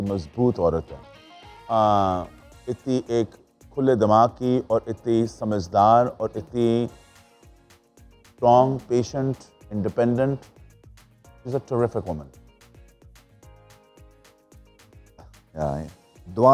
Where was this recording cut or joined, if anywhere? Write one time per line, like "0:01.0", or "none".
none

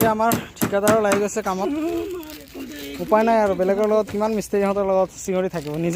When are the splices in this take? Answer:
none

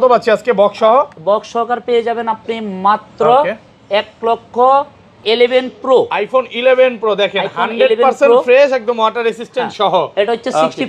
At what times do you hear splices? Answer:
0:05.1

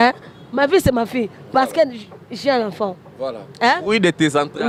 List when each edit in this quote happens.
none

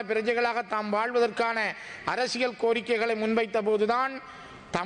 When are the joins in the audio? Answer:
none

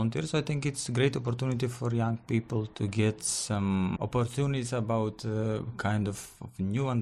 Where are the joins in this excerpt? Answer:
0:02.7
0:04.0

